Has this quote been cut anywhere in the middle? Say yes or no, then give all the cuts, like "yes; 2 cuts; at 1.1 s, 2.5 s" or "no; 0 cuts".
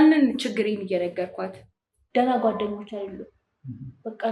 yes; 1 cut; at 1.9 s